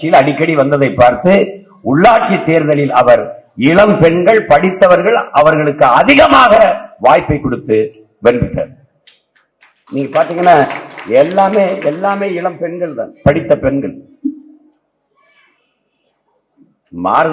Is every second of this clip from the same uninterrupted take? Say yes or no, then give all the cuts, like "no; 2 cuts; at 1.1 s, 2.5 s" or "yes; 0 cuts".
yes; 0 cuts